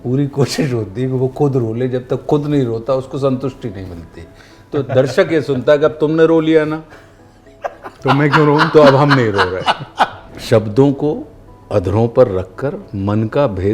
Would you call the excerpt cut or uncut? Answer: cut